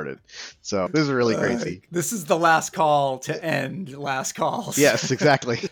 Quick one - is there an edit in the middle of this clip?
yes; 1 cut; at 1.8 s

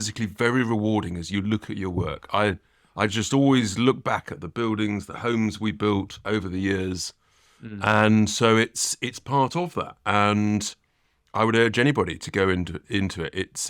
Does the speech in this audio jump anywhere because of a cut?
no; 0 cuts

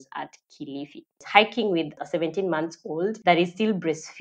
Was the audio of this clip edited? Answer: yes; 3 cuts; at 1.2 s, 2.0 s, 3.2 s

